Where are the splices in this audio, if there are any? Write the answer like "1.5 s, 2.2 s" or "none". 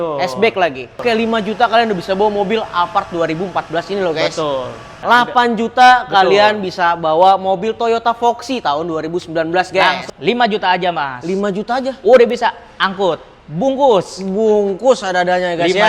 1.0 s, 4.9 s, 10.1 s